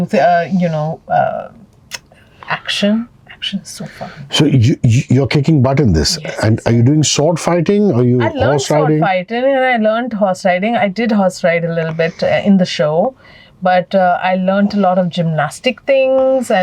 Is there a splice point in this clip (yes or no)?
no